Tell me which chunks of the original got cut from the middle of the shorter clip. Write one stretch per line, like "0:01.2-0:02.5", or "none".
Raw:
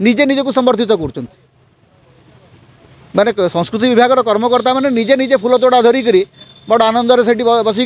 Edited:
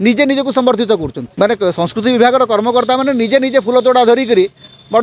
0:01.2-0:03.0